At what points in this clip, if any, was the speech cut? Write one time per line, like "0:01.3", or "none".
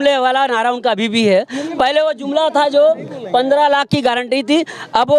none